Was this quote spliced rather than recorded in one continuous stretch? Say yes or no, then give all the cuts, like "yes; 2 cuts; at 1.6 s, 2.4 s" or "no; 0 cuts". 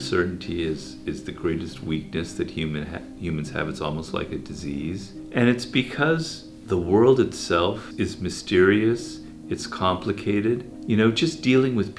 no; 0 cuts